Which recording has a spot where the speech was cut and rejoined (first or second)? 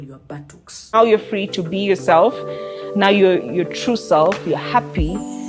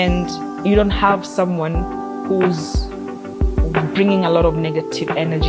first